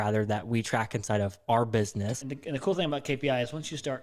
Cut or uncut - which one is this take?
cut